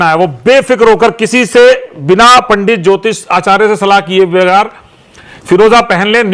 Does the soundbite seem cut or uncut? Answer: uncut